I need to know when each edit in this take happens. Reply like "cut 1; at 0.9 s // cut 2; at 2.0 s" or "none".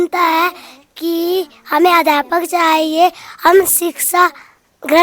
none